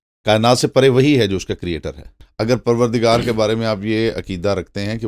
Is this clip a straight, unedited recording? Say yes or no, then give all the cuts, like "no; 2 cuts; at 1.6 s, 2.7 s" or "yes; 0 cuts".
no; 1 cut; at 2.2 s